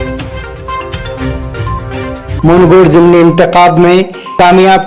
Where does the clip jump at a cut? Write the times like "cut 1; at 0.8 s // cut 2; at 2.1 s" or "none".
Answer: none